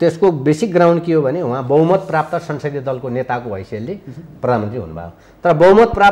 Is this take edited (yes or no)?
no